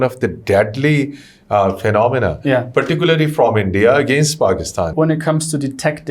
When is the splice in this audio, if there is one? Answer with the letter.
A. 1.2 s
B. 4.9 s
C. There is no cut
B